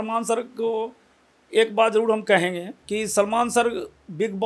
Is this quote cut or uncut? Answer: cut